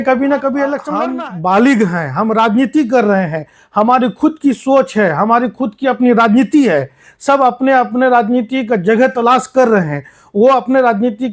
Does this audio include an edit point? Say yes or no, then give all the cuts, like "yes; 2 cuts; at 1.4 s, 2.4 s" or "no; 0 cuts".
yes; 1 cut; at 0.9 s